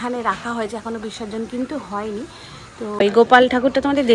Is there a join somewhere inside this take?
yes; 1 cut; at 2.8 s

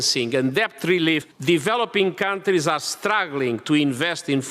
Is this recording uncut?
no; 1 cut; at 1.3 s

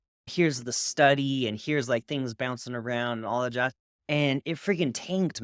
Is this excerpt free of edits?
yes; 0 cuts

